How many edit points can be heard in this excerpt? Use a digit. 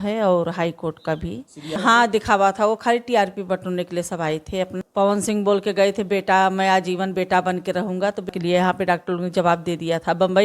3